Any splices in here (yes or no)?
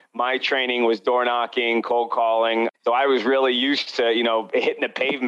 yes